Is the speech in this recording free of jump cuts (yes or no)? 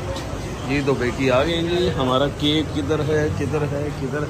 yes